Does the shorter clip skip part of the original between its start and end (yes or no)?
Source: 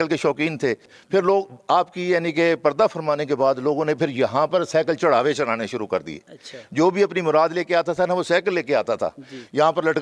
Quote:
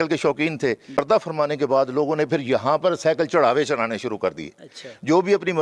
yes